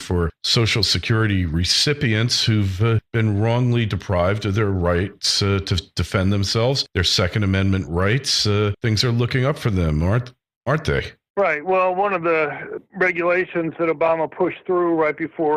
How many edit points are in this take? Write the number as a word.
one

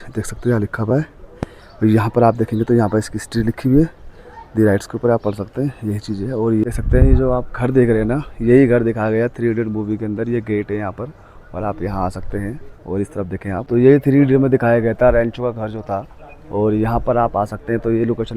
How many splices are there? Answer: one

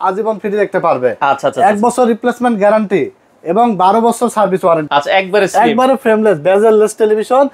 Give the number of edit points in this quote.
one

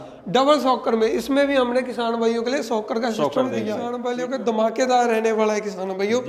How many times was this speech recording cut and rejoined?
one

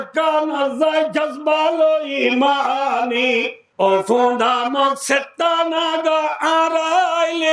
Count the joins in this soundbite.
one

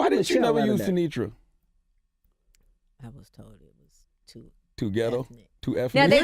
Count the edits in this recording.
one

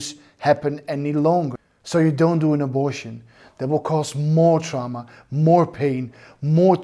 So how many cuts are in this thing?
zero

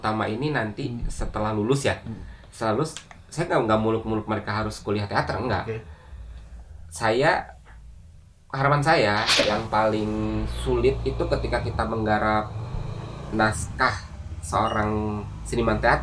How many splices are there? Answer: one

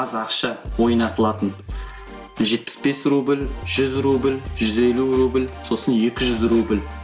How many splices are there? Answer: zero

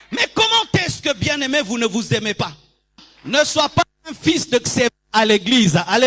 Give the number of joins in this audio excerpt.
one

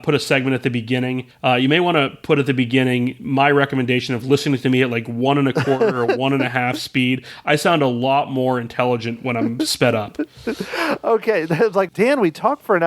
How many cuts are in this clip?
two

